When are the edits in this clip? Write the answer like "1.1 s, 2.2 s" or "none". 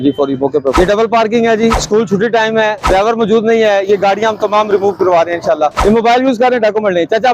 0.8 s, 1.8 s, 2.8 s, 5.8 s